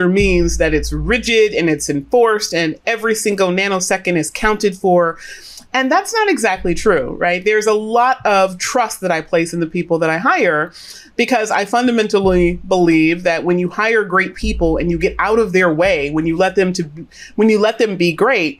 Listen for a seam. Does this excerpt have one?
no; 0 cuts

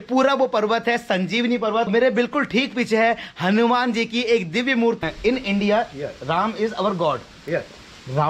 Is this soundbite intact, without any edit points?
no; 2 cuts; at 1.9 s, 5.0 s

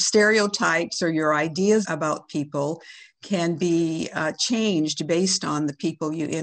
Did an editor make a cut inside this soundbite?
yes; 1 cut; at 1.8 s

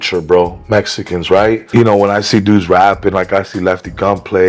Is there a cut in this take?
yes; 1 cut; at 1.6 s

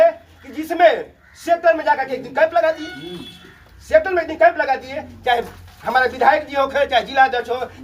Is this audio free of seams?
yes; 0 cuts

